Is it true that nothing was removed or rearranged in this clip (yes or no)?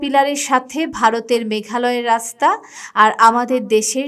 yes